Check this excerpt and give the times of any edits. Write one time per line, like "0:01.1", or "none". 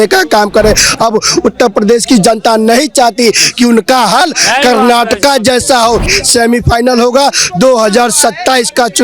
0:06.1